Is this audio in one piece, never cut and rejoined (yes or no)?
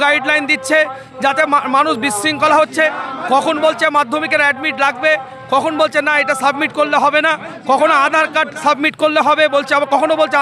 yes